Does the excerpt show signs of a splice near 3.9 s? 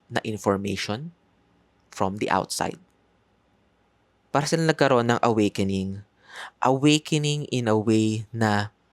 yes; 1 cut; at 3.9 s

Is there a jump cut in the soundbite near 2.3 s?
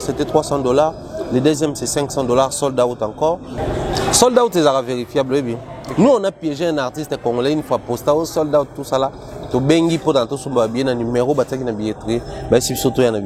no; 1 cut; at 3.6 s

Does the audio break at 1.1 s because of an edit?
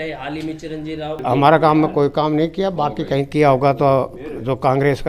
yes; 1 cut; at 1.1 s

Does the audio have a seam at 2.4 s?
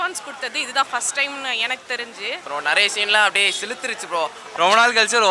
yes; 2 cuts; at 2.4 s, 4.4 s

